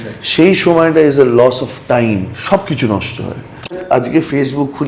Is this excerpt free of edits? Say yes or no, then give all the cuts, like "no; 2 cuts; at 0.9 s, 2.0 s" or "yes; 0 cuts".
no; 2 cuts; at 2.4 s, 3.8 s